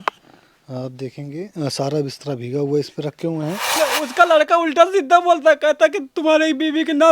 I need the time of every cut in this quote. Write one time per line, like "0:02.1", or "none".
0:03.8